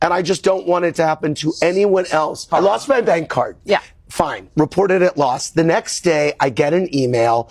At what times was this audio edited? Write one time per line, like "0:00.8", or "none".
none